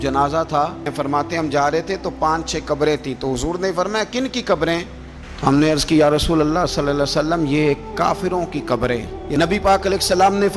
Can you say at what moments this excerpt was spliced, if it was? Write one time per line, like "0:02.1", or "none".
0:00.9
0:09.2